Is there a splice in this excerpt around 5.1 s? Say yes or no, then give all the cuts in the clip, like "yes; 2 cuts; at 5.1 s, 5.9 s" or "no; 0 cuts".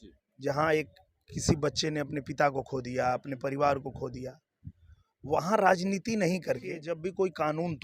no; 1 cut; at 6.9 s